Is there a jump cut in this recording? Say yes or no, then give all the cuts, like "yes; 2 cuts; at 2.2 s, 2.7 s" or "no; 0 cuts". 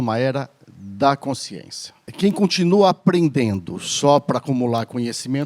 yes; 1 cut; at 2.1 s